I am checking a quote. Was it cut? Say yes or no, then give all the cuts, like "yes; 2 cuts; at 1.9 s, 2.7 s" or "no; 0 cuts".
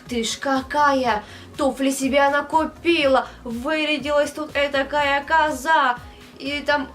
no; 0 cuts